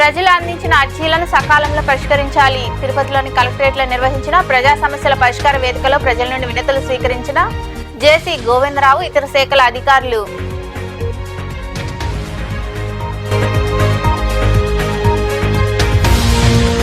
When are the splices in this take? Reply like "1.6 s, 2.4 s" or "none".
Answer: 13.3 s, 14.8 s